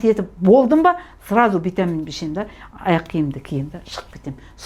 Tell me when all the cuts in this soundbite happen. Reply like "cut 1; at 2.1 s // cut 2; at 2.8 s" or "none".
none